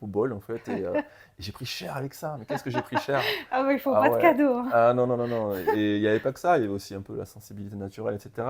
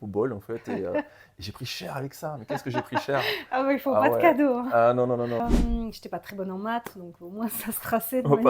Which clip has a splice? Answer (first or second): second